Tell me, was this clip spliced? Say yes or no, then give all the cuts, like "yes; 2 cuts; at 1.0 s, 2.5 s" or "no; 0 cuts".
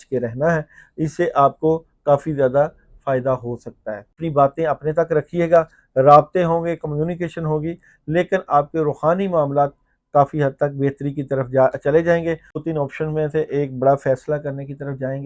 yes; 2 cuts; at 4.2 s, 12.5 s